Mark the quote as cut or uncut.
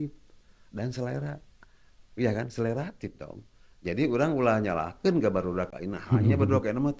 uncut